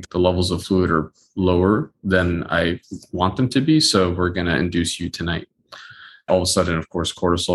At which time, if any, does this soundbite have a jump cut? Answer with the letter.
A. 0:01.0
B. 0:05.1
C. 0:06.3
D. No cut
C